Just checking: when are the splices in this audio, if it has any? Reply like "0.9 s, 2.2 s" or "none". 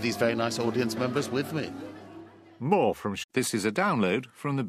none